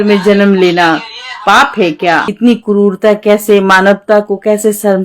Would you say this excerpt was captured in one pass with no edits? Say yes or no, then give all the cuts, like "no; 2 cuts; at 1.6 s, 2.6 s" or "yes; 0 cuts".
no; 1 cut; at 2.3 s